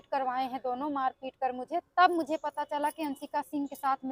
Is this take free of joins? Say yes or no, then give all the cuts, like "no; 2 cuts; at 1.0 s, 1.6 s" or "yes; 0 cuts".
yes; 0 cuts